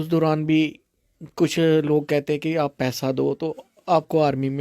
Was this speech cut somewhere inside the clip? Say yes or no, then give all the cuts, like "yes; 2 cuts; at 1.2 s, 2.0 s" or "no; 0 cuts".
no; 0 cuts